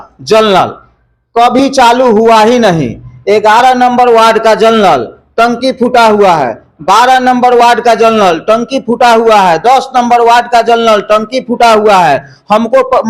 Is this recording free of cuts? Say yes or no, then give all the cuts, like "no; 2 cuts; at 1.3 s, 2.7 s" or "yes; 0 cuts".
yes; 0 cuts